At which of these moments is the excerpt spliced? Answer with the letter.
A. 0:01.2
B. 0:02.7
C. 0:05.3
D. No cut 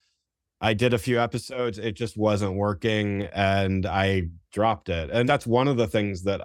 C